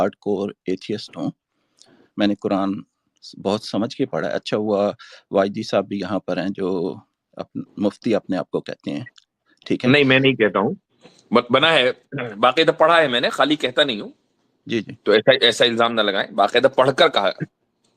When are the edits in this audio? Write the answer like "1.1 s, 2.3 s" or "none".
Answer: none